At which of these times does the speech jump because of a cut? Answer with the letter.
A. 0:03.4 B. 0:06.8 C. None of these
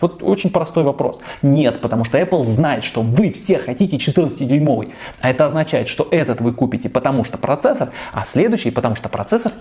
C